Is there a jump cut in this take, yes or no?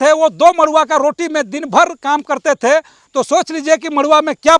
no